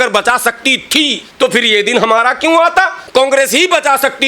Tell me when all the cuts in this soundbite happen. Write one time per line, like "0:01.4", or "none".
0:01.2
0:03.0